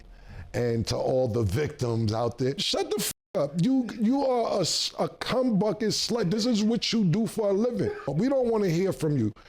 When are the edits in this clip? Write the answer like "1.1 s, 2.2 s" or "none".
2.6 s, 8.1 s